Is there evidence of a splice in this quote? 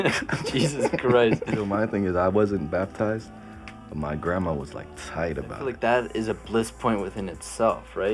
yes; 2 cuts; at 1.7 s, 5.7 s

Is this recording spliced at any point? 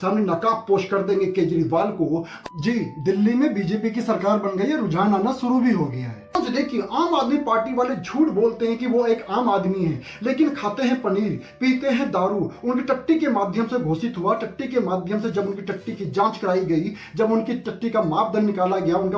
yes; 2 cuts; at 2.4 s, 6.4 s

